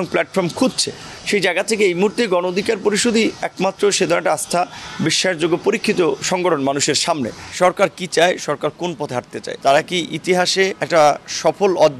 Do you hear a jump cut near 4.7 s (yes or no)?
no